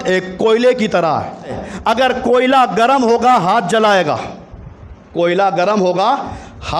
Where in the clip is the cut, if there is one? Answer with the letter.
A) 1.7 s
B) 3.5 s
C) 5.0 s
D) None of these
A